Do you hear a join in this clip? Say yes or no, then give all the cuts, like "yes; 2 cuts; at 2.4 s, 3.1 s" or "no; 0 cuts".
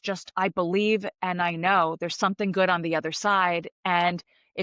no; 0 cuts